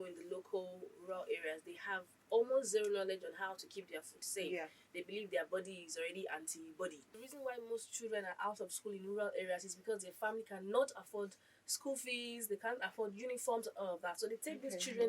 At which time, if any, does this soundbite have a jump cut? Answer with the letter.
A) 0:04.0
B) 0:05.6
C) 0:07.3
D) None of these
C